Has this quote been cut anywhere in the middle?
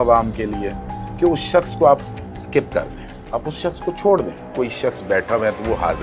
yes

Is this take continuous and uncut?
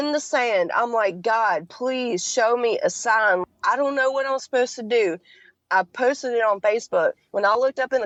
yes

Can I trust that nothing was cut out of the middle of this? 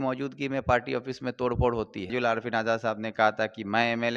no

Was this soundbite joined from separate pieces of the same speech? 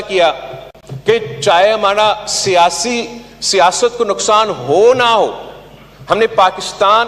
no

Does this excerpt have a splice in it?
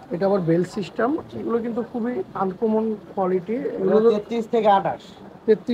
no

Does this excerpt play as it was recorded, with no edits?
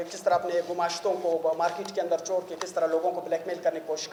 yes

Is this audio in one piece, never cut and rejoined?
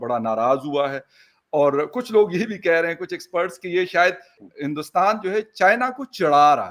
no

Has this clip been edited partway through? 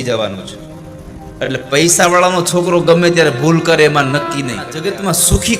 yes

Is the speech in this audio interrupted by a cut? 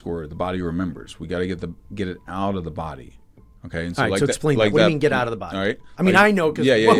no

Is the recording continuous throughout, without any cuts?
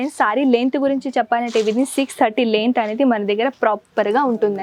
yes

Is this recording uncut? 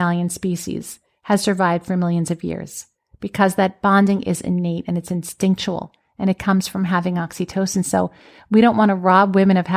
yes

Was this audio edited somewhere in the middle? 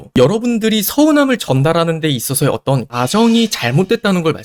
no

